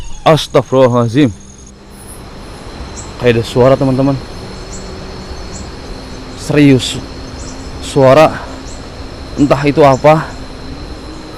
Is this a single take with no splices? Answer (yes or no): no